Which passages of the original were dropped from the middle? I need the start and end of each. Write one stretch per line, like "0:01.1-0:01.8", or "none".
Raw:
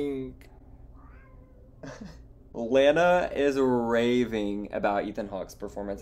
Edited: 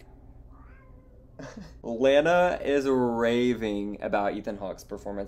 0:02.2-0:02.4